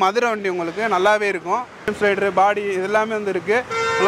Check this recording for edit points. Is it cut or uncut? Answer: cut